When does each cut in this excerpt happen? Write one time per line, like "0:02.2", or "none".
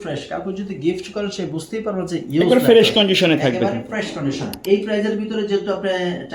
0:04.6